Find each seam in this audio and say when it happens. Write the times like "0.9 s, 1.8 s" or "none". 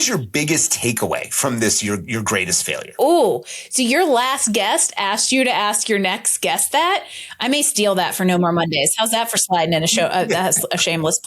2.8 s